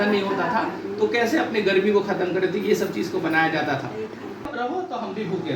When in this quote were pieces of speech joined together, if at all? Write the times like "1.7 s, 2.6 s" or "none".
4.5 s